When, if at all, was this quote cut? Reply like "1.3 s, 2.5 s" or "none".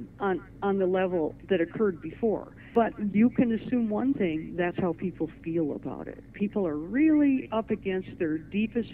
2.7 s